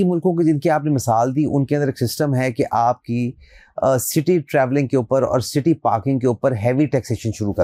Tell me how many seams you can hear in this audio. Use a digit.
0